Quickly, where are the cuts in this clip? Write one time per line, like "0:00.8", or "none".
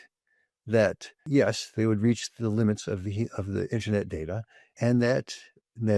0:01.1
0:04.8